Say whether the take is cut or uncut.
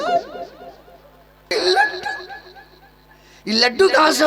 cut